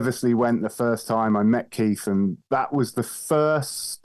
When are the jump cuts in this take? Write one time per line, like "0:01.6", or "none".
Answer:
0:02.4